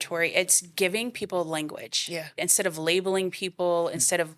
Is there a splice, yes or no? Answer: yes